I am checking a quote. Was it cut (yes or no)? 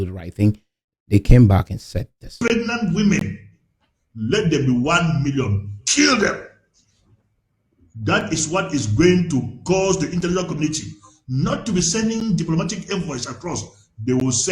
no